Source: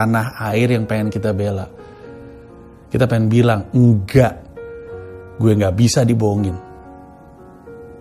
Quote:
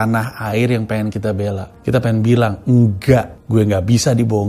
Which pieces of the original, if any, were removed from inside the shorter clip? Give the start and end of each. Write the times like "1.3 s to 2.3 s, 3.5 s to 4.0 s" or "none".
1.7 s to 2.8 s, 4.4 s to 5.3 s